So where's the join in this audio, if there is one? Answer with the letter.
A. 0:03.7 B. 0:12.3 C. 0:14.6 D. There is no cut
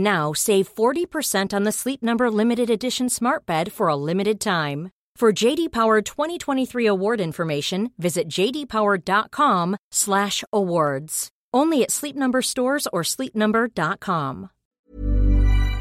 C